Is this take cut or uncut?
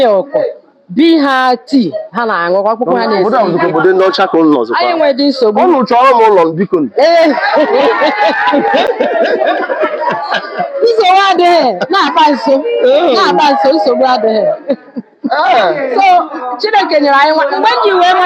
uncut